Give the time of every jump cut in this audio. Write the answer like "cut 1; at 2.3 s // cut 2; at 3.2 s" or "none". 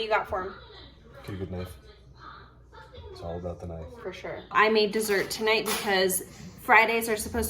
cut 1; at 4.5 s